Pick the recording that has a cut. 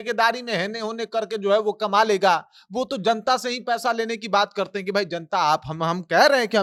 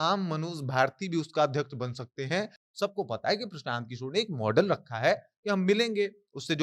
second; 1 cut; at 2.6 s

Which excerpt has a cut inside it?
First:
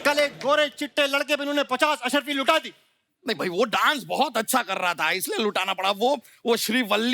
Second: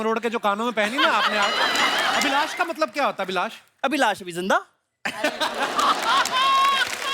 second; 1 cut; at 2.2 s

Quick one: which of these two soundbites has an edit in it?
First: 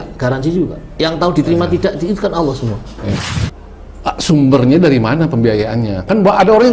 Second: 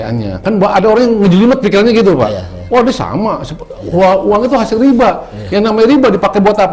first; 1 cut; at 3.2 s

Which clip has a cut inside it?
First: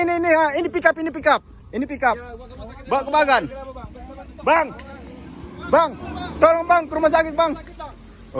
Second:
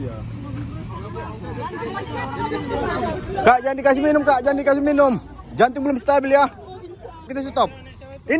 second; 1 cut; at 7.3 s

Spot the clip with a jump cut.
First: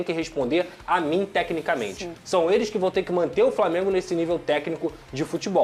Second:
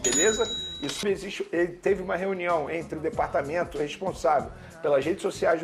second; 1 cut; at 1.0 s

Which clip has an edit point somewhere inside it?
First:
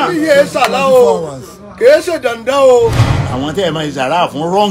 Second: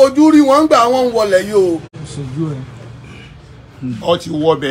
first; 1 cut; at 3.1 s

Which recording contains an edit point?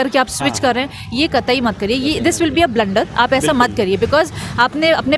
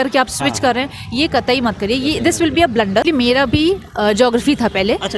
second; 1 cut; at 3.0 s

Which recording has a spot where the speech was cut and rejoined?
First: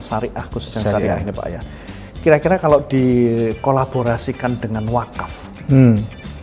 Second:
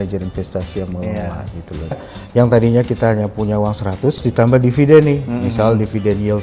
second; 2 cuts; at 2.0 s, 4.2 s

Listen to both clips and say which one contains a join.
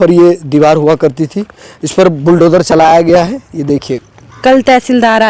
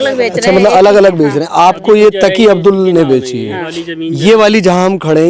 first; 1 cut; at 3.8 s

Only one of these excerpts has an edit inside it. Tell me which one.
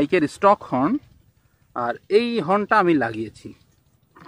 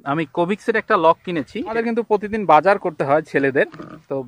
second; 1 cut; at 1.7 s

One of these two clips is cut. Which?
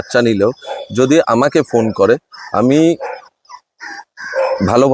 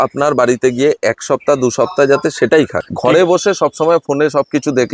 second; 1 cut; at 2.8 s

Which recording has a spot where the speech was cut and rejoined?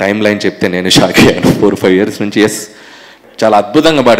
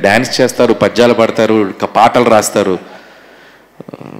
first; 1 cut; at 3.1 s

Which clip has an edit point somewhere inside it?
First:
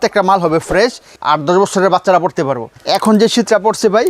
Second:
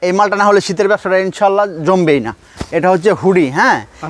first; 2 cuts; at 1.1 s, 2.7 s

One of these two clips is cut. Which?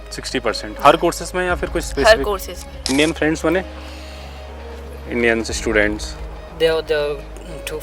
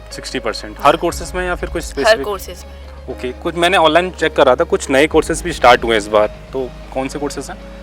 first; 1 cut; at 2.8 s

